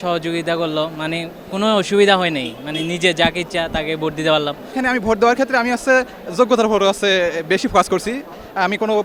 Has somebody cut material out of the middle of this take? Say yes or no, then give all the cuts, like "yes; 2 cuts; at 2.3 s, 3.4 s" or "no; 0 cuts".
yes; 1 cut; at 4.7 s